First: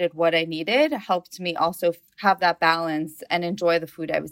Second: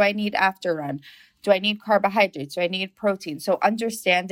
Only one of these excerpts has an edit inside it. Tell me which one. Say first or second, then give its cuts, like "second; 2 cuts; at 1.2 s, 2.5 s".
first; 1 cut; at 3.2 s